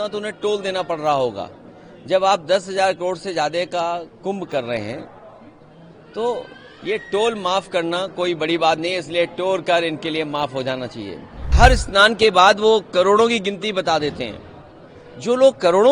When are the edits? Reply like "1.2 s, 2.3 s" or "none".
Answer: 11.5 s